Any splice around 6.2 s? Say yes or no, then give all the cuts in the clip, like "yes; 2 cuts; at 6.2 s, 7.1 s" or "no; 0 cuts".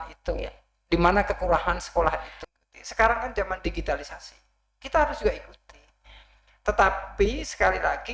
no; 1 cut; at 2.4 s